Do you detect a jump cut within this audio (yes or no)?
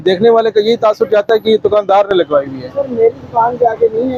no